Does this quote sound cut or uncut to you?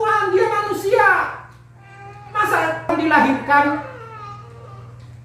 cut